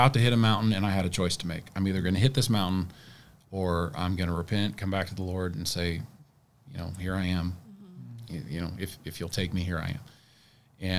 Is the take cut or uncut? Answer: uncut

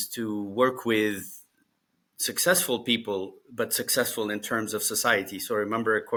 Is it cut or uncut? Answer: uncut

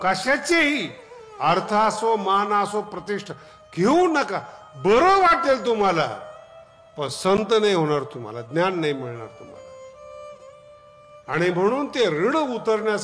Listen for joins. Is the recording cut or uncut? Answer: uncut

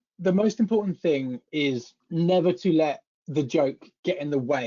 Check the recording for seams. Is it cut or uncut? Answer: cut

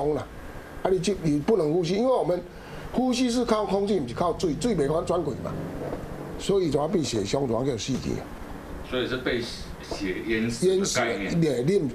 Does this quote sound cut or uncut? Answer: uncut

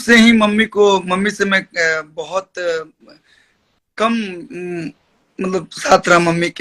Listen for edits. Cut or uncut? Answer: uncut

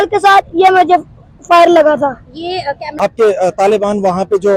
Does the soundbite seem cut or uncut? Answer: cut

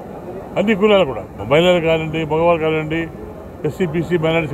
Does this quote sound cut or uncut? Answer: cut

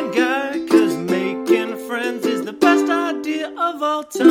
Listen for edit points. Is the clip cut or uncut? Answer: uncut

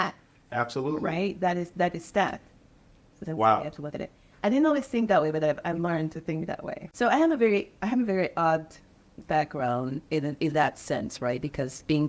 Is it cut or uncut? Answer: cut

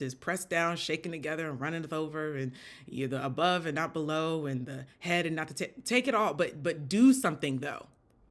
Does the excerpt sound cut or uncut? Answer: uncut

